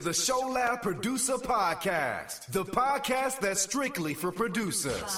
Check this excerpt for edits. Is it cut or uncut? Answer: uncut